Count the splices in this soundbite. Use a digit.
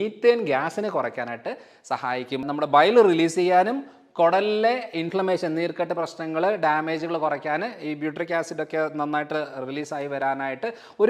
1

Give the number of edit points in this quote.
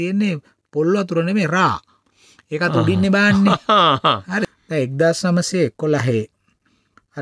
1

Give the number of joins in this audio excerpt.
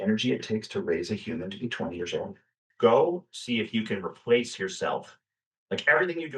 1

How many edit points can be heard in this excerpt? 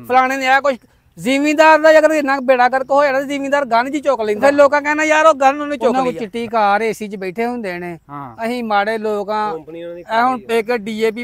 2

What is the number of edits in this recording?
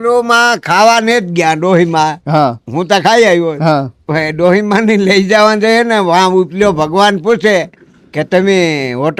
0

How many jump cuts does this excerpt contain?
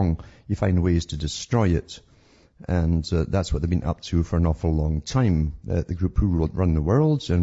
1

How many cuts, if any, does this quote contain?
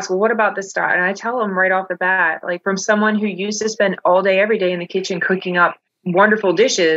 1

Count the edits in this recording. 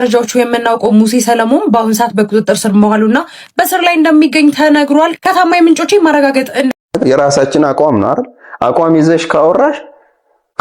1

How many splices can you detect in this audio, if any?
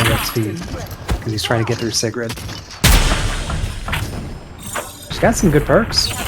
1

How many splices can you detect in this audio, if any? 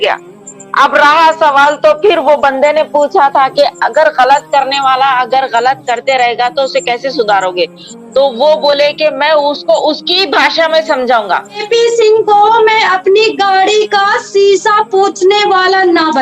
1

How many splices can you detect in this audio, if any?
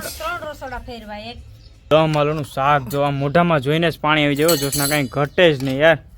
1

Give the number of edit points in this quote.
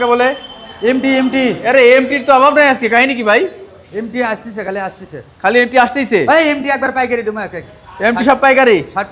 0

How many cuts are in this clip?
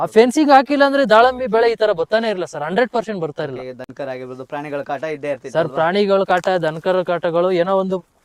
0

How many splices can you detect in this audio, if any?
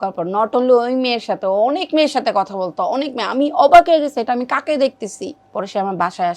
1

